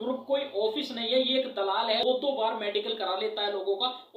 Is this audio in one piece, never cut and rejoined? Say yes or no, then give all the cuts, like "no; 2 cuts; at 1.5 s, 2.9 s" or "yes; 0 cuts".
no; 1 cut; at 2.0 s